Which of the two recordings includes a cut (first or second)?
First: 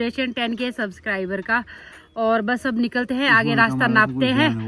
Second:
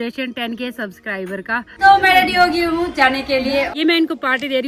second